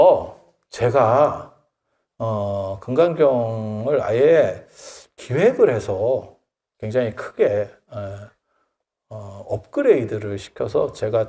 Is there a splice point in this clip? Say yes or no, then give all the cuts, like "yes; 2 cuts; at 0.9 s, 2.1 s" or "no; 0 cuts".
no; 0 cuts